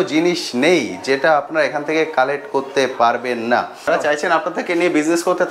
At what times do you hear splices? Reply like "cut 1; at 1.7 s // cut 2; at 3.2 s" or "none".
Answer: cut 1; at 3.9 s